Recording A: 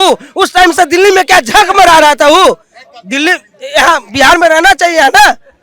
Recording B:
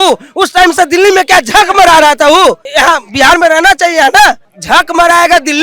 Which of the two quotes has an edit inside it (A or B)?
B